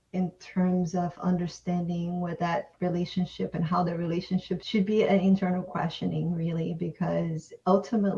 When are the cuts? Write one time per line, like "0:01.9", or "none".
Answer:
0:04.6